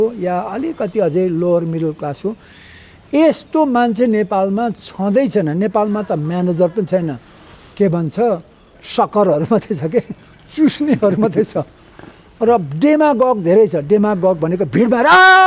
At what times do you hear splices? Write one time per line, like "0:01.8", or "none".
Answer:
none